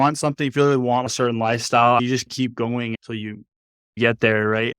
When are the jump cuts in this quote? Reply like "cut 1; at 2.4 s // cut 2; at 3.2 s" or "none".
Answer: cut 1; at 1.1 s // cut 2; at 4.0 s

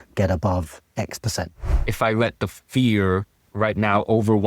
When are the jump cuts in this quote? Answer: cut 1; at 1.6 s // cut 2; at 3.4 s

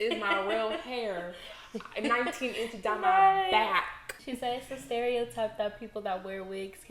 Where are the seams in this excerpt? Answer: cut 1; at 4.1 s

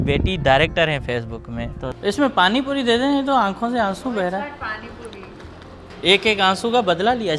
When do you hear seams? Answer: cut 1; at 1.8 s // cut 2; at 5.8 s

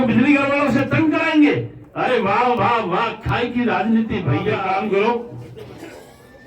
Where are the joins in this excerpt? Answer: cut 1; at 4.6 s

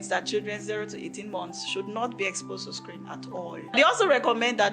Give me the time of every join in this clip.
cut 1; at 3.7 s

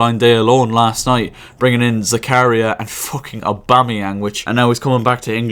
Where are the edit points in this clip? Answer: cut 1; at 4.4 s

